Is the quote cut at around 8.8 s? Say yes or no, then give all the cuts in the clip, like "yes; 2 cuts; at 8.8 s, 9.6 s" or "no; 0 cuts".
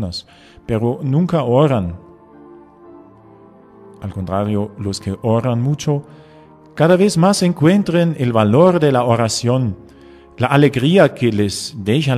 yes; 1 cut; at 8.8 s